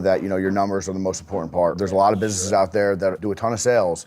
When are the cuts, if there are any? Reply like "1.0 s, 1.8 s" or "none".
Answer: 1.8 s, 3.2 s